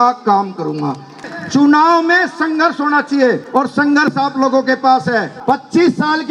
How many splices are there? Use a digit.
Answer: 3